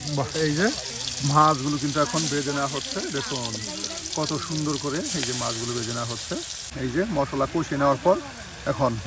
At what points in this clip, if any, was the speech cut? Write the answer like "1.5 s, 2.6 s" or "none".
6.7 s